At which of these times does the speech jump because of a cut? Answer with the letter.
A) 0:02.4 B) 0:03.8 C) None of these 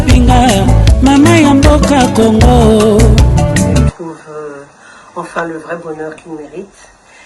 B